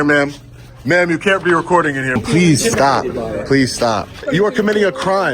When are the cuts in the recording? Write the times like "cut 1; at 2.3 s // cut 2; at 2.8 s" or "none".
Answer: cut 1; at 2.2 s // cut 2; at 4.2 s

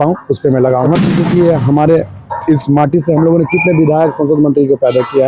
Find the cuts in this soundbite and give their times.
cut 1; at 1.0 s

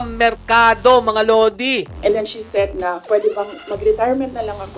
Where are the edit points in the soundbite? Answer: cut 1; at 1.9 s // cut 2; at 3.0 s

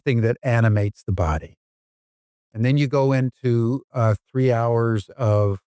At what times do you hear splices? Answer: none

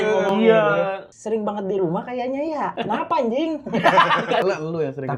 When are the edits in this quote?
cut 1; at 1.1 s // cut 2; at 2.8 s // cut 3; at 4.4 s

